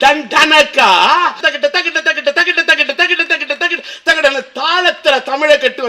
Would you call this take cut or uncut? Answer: cut